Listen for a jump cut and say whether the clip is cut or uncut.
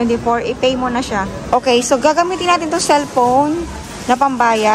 cut